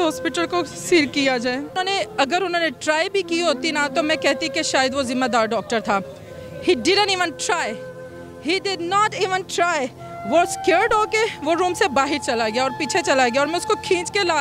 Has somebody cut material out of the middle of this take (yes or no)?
yes